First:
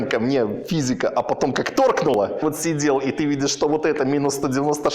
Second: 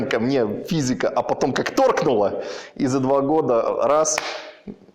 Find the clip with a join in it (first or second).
first